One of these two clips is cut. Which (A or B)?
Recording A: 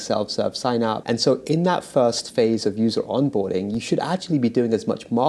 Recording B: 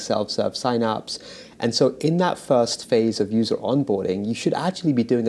A